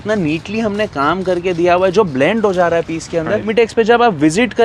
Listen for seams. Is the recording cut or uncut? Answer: cut